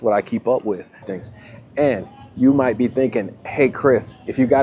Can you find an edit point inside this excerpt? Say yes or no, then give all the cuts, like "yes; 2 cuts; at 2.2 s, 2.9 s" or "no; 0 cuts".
yes; 1 cut; at 1.1 s